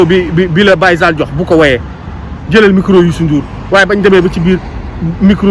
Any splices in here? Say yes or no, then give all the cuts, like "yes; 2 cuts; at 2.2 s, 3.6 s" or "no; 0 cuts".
no; 0 cuts